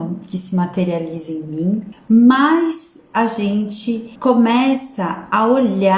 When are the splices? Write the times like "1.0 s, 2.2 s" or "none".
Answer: 1.9 s, 4.1 s